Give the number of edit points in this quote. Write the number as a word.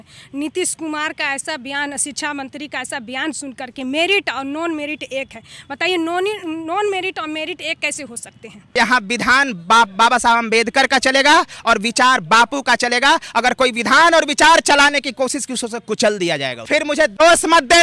two